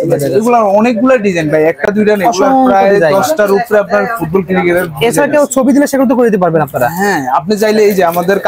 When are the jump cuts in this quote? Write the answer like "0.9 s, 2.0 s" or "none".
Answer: none